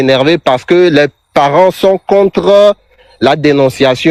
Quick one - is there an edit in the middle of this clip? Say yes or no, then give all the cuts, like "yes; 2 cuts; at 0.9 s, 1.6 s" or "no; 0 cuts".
no; 0 cuts